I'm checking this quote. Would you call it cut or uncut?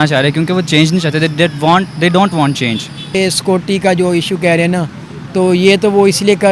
cut